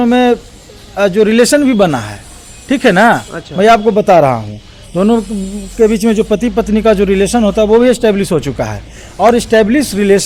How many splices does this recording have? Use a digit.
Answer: 0